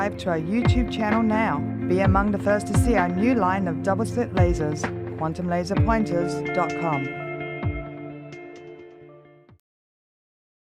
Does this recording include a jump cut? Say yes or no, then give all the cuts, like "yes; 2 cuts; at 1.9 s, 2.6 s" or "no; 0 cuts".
yes; 1 cut; at 3.5 s